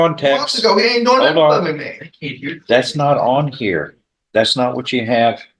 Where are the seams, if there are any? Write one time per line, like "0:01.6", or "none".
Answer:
none